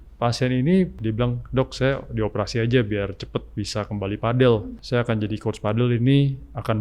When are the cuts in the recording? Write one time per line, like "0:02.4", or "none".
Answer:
0:01.0
0:04.8